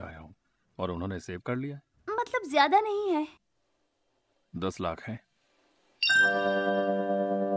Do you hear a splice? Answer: no; 0 cuts

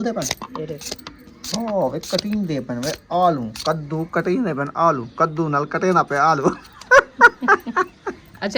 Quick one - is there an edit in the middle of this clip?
no; 0 cuts

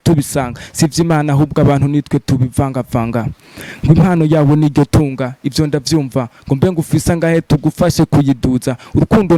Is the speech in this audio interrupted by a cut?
no; 0 cuts

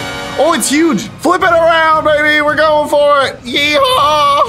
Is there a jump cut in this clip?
yes; 1 cut; at 1.2 s

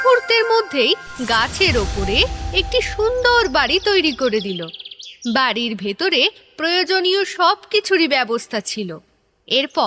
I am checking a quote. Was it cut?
no; 0 cuts

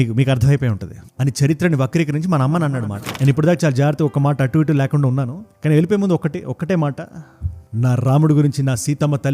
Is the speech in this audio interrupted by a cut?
yes; 1 cut; at 3.0 s

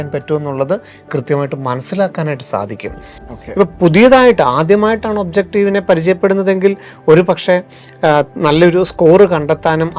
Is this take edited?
no; 0 cuts

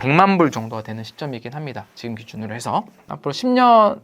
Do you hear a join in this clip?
yes; 1 cut; at 3.0 s

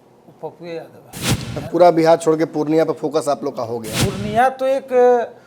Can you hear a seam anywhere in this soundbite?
yes; 1 cut; at 3.8 s

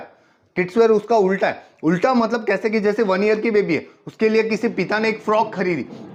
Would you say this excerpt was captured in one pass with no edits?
yes; 0 cuts

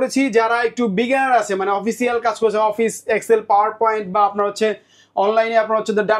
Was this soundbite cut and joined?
no; 0 cuts

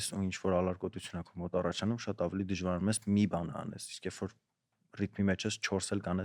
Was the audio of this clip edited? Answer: no; 0 cuts

